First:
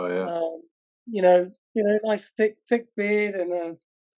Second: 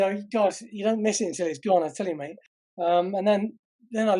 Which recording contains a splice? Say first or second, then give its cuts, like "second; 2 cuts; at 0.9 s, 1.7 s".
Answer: first; 1 cut; at 1.6 s